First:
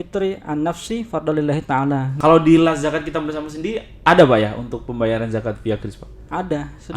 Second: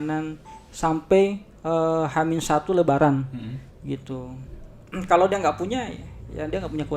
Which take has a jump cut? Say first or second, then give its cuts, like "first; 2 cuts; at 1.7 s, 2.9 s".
first; 1 cut; at 2.1 s